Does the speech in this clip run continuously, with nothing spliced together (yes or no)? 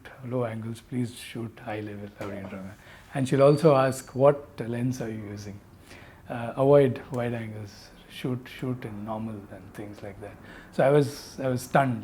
yes